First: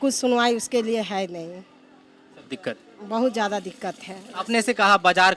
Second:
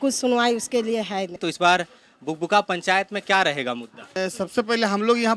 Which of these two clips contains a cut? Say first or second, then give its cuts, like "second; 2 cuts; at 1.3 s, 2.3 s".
second; 2 cuts; at 1.3 s, 4.1 s